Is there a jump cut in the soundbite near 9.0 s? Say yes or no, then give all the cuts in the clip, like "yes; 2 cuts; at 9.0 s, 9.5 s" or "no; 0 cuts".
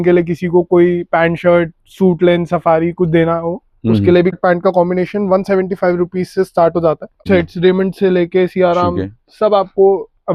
no; 2 cuts; at 4.3 s, 7.2 s